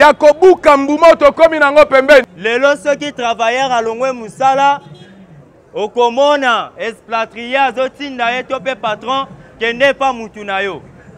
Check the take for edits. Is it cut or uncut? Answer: cut